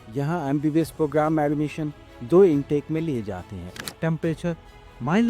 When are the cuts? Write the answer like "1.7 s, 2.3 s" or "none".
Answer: 3.8 s